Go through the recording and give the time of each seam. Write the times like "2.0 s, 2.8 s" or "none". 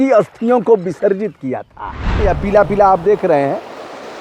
2.3 s